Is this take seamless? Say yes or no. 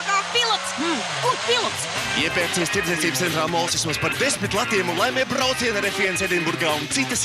yes